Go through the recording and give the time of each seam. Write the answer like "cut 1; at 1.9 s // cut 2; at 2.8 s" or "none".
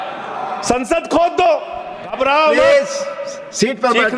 cut 1; at 2.1 s